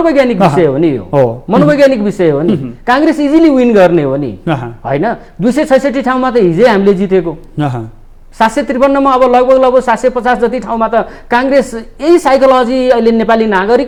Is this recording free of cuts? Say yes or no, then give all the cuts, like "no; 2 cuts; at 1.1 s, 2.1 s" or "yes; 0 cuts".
yes; 0 cuts